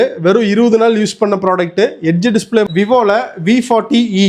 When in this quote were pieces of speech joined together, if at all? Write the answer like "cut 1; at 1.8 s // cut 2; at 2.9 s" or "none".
cut 1; at 2.7 s